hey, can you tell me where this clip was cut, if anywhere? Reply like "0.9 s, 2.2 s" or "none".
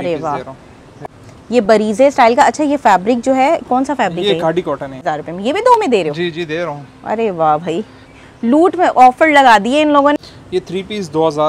1.0 s, 5.0 s, 10.1 s